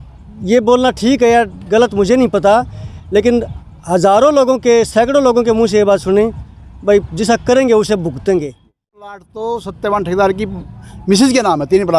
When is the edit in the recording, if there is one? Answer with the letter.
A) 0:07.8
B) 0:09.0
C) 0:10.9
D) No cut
B